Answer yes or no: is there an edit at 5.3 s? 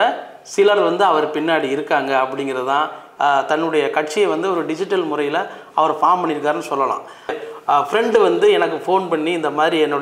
no